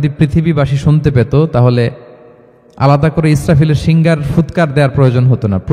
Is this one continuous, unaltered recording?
yes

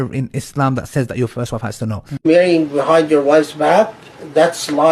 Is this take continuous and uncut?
no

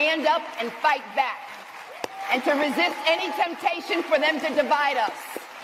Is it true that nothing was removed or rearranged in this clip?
yes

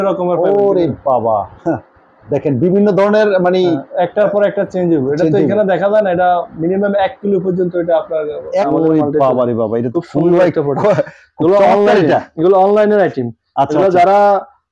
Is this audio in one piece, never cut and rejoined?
no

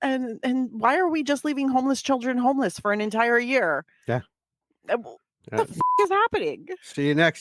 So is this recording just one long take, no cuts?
yes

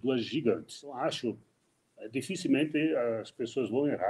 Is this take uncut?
no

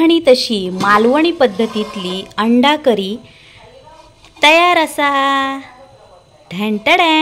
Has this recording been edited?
no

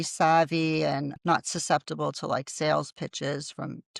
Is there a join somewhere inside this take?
yes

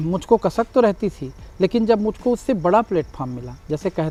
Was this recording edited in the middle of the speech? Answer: no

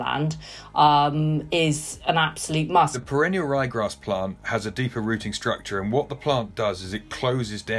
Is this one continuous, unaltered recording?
no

